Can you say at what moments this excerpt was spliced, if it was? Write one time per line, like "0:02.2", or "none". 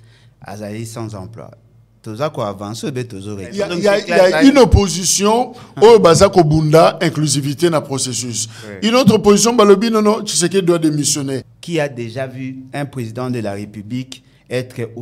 0:03.7
0:11.5
0:12.6